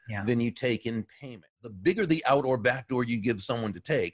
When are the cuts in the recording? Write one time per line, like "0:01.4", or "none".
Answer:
0:01.6